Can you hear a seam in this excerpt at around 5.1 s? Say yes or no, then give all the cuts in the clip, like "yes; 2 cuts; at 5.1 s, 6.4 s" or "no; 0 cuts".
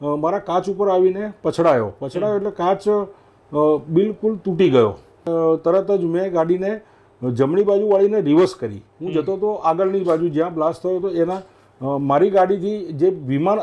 yes; 1 cut; at 5.1 s